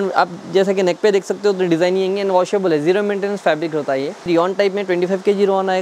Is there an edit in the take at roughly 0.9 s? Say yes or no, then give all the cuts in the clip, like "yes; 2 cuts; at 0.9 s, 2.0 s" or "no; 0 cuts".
no; 1 cut; at 4.3 s